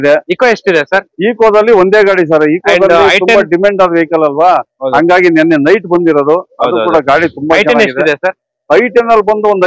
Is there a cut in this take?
no; 0 cuts

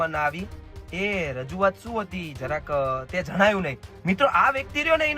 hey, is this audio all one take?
no; 1 cut; at 3.8 s

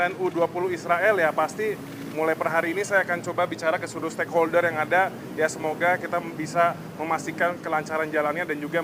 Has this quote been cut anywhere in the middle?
no; 0 cuts

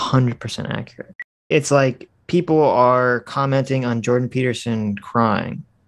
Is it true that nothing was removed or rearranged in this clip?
no; 1 cut; at 1.5 s

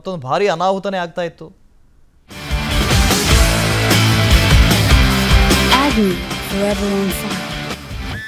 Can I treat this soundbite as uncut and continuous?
yes; 0 cuts

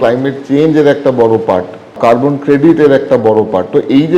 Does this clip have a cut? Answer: yes; 1 cut; at 2.0 s

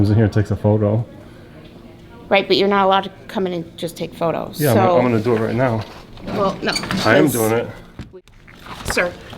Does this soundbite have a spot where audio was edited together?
yes; 1 cut; at 7.9 s

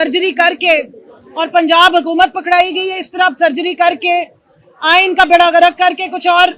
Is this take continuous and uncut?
yes; 0 cuts

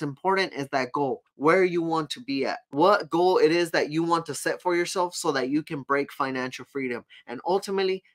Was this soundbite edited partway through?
yes; 2 cuts; at 1.3 s, 2.6 s

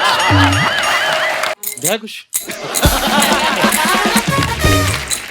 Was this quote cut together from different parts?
yes; 1 cut; at 1.6 s

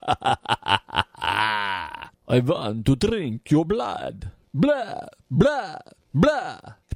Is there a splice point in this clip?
no; 0 cuts

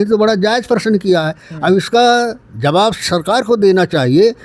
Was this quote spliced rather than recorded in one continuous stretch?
no; 0 cuts

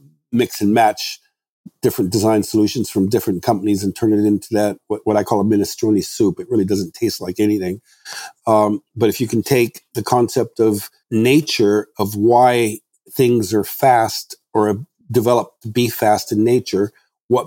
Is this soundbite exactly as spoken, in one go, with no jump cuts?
no; 1 cut; at 10.9 s

